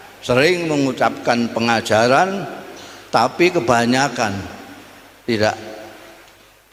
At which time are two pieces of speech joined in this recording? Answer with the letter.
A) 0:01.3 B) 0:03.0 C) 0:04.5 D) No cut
D